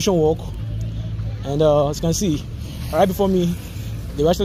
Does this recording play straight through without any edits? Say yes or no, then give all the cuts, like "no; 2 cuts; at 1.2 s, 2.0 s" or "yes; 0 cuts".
yes; 0 cuts